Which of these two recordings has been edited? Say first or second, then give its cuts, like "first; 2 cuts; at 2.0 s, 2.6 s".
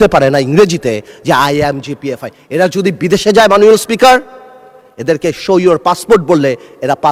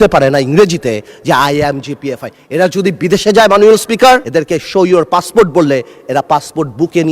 second; 1 cut; at 4.3 s